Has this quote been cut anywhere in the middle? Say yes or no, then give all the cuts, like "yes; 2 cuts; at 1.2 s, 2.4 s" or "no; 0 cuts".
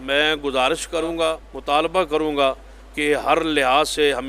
yes; 1 cut; at 1.5 s